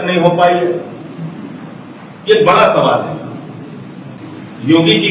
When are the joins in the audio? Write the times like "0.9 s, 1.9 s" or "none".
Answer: 4.1 s